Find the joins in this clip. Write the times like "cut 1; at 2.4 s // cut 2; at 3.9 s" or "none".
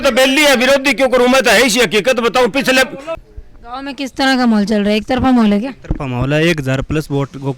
cut 1; at 3.1 s